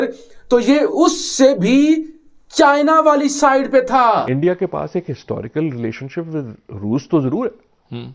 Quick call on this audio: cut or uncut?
cut